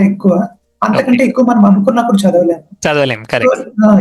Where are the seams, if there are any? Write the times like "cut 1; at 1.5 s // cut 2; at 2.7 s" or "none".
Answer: none

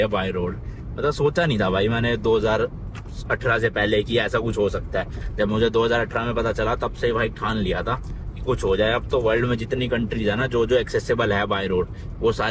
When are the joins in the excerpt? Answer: none

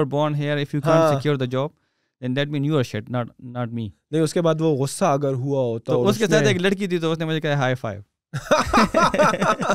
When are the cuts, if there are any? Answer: none

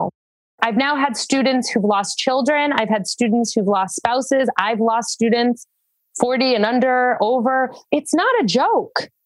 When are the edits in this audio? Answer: cut 1; at 7.8 s

